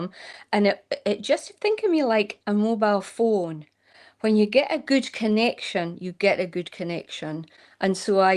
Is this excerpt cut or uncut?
uncut